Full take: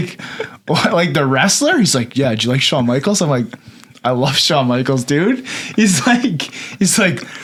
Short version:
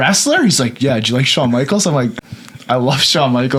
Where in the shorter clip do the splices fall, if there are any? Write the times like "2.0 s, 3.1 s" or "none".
none